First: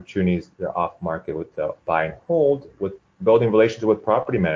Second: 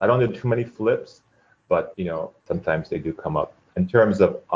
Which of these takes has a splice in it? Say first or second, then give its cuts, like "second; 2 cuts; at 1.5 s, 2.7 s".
first; 1 cut; at 1.5 s